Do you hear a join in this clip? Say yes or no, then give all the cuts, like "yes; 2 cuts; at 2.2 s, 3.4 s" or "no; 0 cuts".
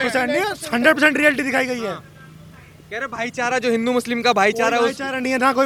no; 0 cuts